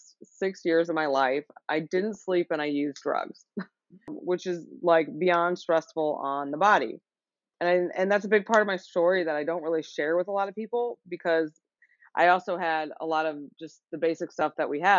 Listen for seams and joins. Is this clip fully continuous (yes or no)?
no